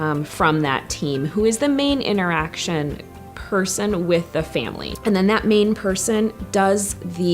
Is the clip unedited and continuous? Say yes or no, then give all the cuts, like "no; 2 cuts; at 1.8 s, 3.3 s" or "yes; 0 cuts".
no; 1 cut; at 4.8 s